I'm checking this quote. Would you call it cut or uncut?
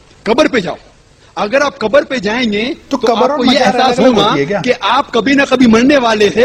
uncut